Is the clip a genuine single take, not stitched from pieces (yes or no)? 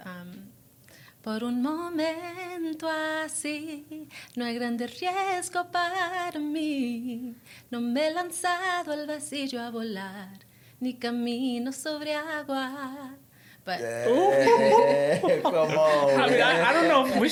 yes